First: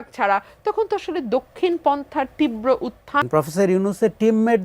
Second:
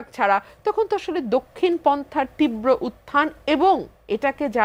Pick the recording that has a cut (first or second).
first